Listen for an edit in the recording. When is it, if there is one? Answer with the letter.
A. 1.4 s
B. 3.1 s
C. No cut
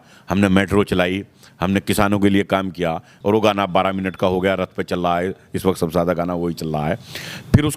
B